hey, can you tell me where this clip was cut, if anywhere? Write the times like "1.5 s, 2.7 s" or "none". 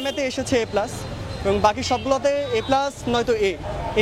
none

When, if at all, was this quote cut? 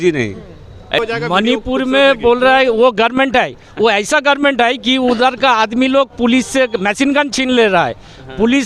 1.0 s

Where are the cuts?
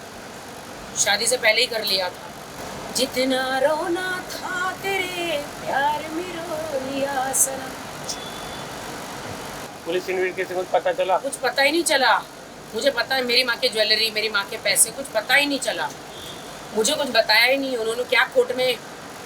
2.6 s, 9.7 s

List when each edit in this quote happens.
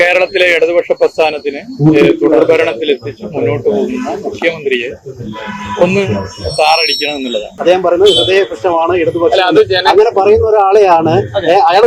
7.5 s

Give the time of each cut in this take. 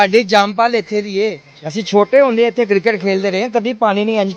none

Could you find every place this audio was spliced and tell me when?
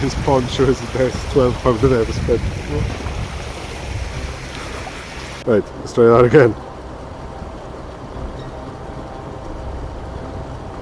5.4 s

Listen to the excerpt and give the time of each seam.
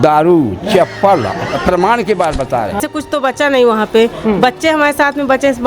2.8 s

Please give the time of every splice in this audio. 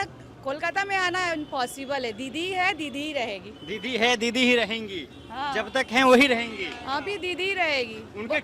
none

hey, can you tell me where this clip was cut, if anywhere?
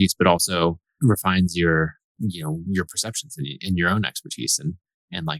0.9 s, 2.0 s

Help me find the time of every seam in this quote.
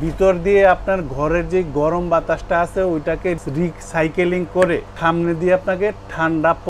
4.9 s

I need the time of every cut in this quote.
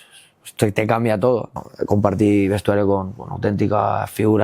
1.6 s

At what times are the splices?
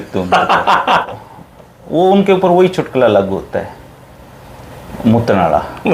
1.1 s

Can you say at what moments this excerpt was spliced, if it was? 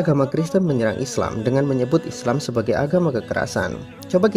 none

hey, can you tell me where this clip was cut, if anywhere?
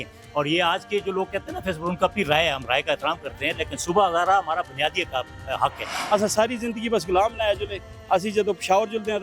5.9 s

